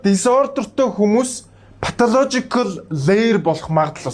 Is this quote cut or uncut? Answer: uncut